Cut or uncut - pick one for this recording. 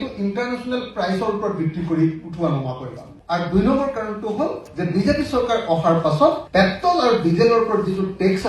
cut